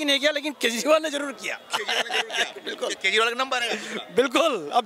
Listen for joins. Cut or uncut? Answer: uncut